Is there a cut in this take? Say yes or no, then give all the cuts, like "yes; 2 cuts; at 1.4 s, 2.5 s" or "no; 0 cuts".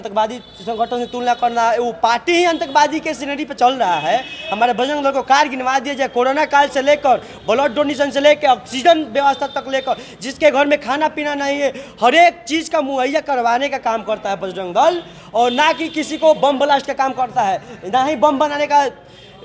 no; 0 cuts